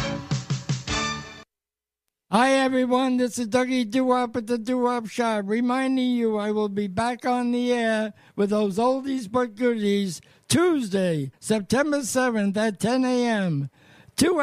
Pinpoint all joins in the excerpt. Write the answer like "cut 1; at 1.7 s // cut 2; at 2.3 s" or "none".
cut 1; at 1.7 s